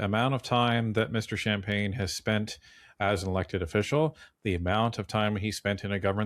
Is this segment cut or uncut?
uncut